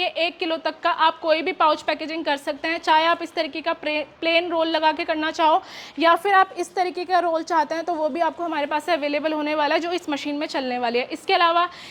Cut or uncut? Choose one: uncut